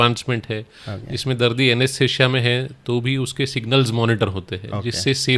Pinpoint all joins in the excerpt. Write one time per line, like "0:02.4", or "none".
none